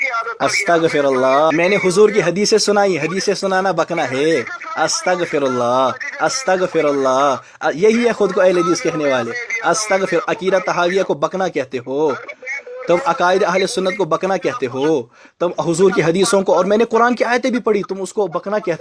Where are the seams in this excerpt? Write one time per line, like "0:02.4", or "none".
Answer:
0:01.5